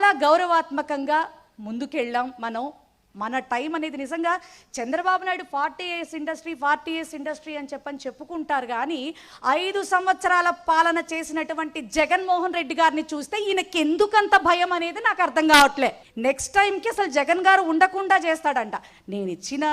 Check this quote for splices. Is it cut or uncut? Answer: cut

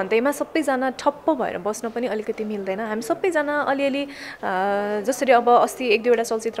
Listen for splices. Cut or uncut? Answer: uncut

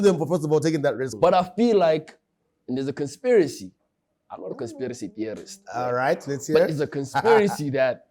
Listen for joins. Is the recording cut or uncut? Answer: cut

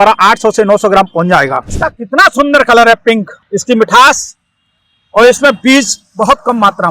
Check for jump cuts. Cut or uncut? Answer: cut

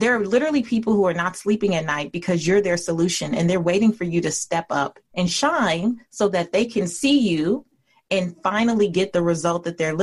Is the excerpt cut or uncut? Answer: cut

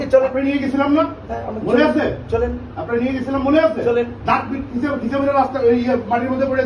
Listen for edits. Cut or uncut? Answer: uncut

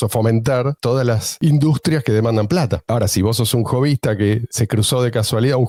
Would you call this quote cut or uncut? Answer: uncut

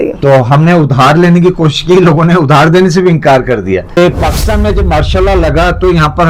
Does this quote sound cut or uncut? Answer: cut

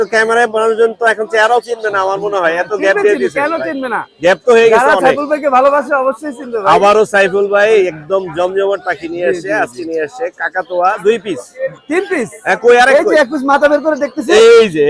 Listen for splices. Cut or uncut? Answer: uncut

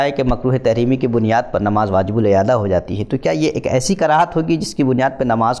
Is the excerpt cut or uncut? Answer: uncut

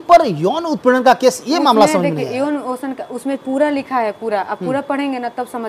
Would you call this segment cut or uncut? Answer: uncut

